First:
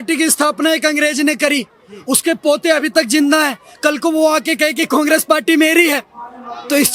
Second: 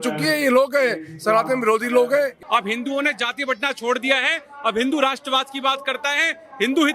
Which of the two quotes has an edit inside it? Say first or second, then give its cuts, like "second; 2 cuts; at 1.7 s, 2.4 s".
second; 1 cut; at 2.4 s